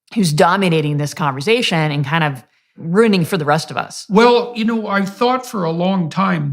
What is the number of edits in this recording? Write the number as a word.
one